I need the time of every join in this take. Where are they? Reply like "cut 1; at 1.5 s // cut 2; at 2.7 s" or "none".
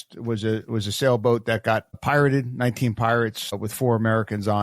cut 1; at 2.0 s // cut 2; at 3.6 s